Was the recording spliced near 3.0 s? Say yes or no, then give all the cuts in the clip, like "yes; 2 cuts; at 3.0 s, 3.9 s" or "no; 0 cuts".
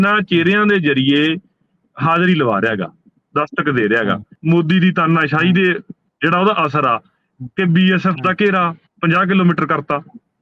no; 1 cut; at 4.3 s